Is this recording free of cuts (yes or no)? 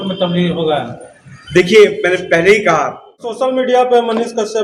no